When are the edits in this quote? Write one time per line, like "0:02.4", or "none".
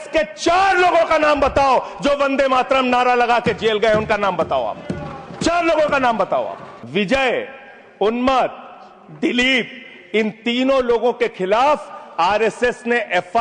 0:06.7